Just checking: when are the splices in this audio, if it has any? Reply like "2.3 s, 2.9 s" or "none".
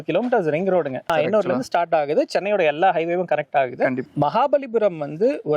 1.1 s, 4.1 s